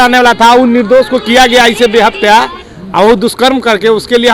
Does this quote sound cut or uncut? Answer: uncut